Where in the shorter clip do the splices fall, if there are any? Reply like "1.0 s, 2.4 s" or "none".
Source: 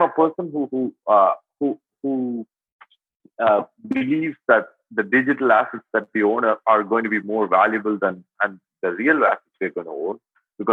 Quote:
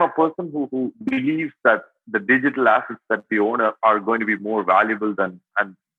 0.9 s

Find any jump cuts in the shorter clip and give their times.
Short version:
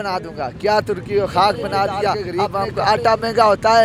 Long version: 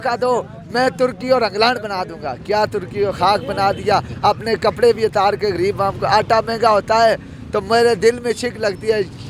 2.4 s

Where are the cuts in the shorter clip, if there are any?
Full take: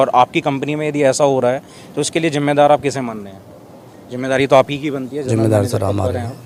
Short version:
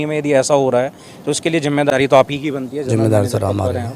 1.9 s

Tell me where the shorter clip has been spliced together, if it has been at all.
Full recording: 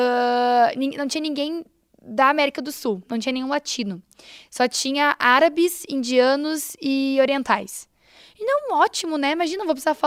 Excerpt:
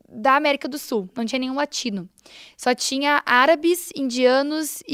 none

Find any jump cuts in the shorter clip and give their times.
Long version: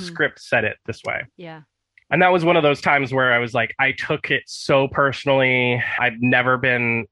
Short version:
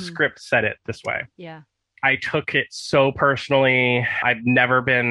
2.0 s

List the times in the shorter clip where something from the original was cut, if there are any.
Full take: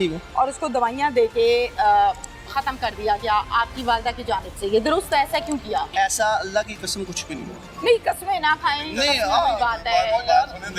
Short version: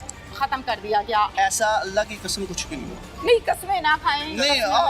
1.3 s

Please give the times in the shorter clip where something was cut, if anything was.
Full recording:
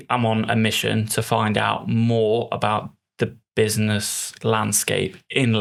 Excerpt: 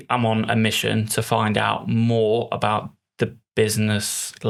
none

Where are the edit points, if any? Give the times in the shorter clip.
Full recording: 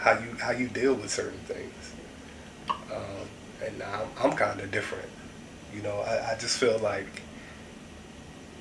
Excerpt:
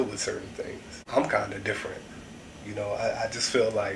1.1 s

